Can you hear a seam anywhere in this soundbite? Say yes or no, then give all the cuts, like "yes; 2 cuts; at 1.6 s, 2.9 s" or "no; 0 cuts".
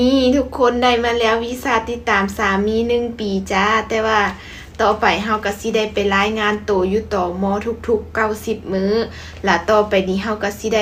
no; 0 cuts